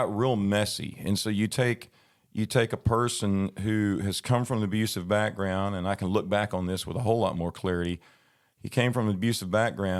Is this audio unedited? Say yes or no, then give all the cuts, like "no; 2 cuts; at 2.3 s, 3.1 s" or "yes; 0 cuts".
yes; 0 cuts